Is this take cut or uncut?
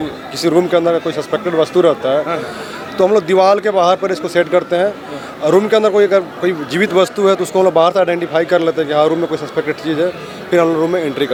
uncut